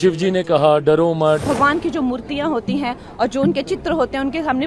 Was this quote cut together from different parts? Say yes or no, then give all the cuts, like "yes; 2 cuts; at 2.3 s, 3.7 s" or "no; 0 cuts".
yes; 1 cut; at 1.4 s